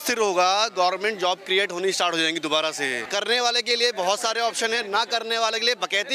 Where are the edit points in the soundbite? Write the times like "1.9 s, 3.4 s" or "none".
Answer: 3.0 s

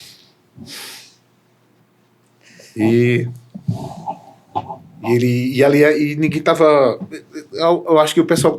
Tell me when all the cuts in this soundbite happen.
2.6 s

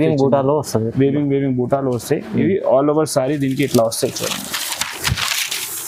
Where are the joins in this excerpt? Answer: none

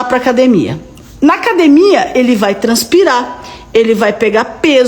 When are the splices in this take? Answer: none

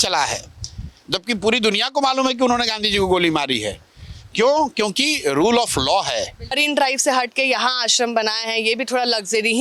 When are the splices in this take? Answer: 6.6 s

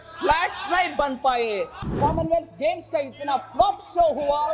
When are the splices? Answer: 1.9 s

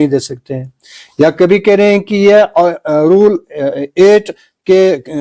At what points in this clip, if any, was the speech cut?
none

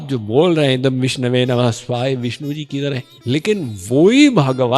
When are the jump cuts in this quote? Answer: 3.1 s

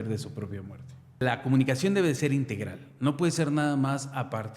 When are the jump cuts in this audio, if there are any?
1.2 s

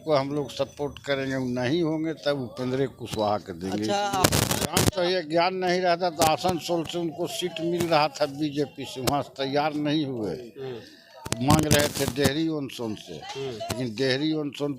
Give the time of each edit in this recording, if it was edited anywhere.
4.2 s

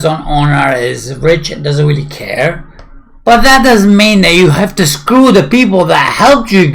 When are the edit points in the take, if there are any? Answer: none

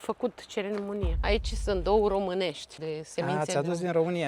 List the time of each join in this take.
1.1 s, 2.7 s

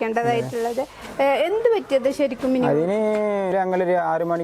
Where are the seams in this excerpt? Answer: 3.5 s

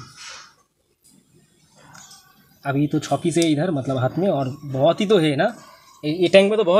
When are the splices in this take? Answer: none

